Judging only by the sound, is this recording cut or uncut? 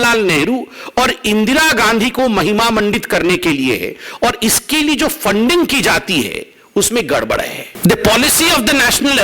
cut